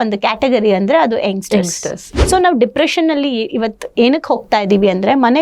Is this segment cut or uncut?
cut